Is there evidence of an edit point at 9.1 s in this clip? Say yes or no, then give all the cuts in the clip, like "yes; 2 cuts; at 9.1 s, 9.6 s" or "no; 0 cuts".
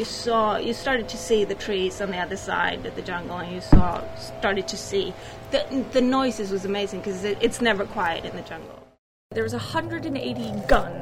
yes; 1 cut; at 9.1 s